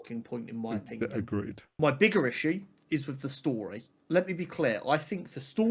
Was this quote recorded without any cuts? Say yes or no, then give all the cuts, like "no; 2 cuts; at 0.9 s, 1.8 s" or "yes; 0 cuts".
no; 2 cuts; at 1.7 s, 4.0 s